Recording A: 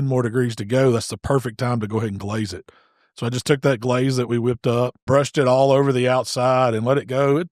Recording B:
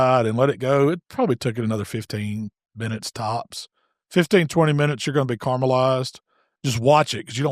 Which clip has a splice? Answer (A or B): A